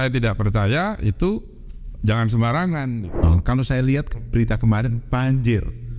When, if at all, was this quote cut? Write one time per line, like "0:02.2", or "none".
0:03.2